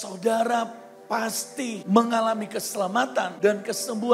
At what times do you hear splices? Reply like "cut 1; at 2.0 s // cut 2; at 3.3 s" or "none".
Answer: cut 1; at 1.8 s // cut 2; at 3.3 s